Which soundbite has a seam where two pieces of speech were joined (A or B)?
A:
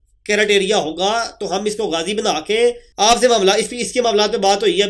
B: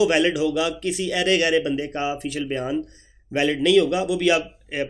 A